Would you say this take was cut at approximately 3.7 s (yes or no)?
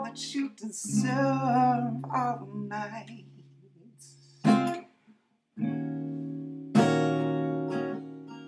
yes